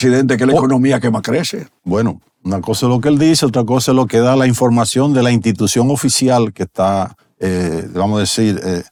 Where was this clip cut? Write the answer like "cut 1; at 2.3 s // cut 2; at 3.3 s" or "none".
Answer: none